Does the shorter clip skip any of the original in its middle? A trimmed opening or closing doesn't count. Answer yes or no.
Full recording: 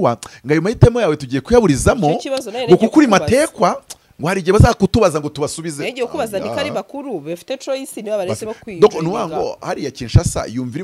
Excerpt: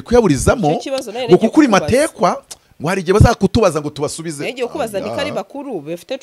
no